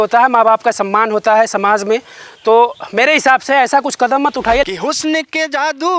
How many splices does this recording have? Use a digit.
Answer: 1